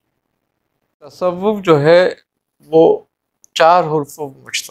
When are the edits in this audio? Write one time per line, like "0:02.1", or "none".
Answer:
0:01.2